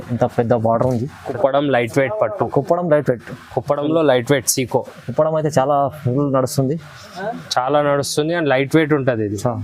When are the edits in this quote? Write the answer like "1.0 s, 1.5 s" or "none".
1.3 s